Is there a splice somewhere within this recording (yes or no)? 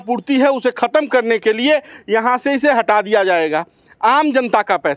no